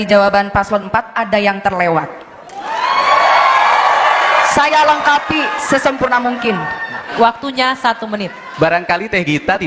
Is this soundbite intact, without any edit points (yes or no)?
no